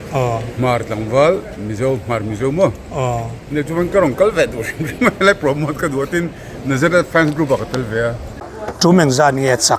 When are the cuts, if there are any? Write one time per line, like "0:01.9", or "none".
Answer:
0:08.4